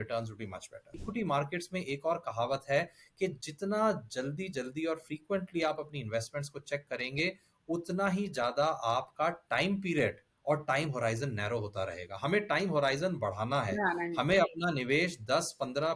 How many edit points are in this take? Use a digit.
1